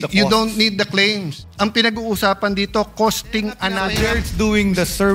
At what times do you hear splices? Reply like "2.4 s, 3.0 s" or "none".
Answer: 1.4 s, 3.8 s

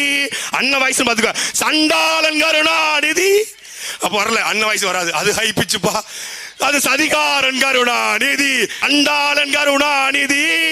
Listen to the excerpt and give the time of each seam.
8.8 s

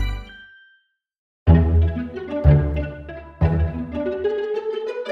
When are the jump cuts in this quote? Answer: 1.4 s

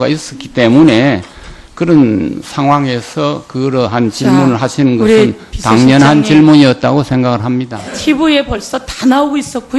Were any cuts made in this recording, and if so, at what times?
5.2 s

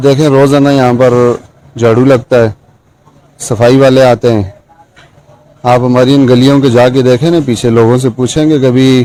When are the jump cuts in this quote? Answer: none

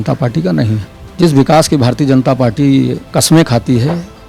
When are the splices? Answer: 1.0 s, 3.0 s

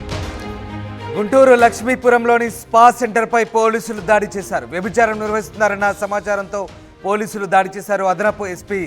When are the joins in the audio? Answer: 1.1 s

